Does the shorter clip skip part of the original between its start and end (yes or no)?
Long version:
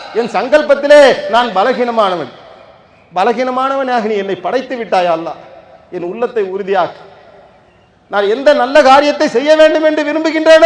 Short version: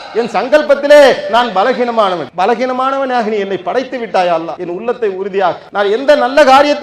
yes